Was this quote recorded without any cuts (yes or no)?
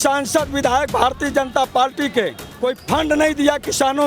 no